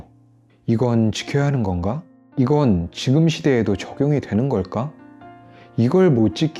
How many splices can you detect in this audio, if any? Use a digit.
1